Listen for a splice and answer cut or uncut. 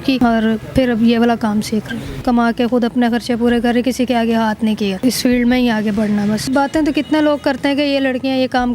cut